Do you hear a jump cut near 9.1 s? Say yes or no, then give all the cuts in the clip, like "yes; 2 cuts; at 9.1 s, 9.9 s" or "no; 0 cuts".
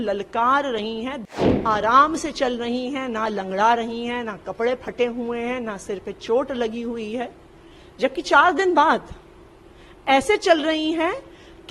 no; 1 cut; at 1.3 s